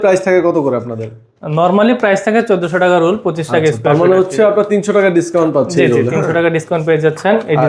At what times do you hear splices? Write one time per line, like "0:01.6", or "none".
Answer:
none